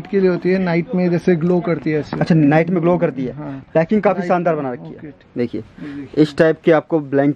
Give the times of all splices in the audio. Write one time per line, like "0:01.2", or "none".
0:05.2